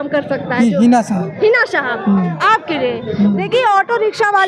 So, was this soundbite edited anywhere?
no; 0 cuts

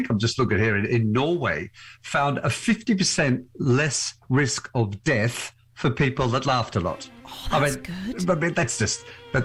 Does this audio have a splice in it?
no; 0 cuts

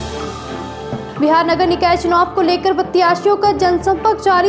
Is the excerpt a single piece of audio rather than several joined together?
yes; 0 cuts

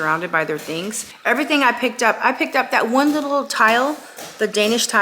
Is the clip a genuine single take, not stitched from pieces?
no; 1 cut; at 1.1 s

